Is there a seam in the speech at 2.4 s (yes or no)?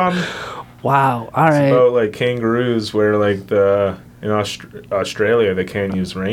no